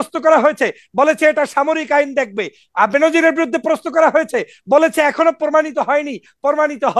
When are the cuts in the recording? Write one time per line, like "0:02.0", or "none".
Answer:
none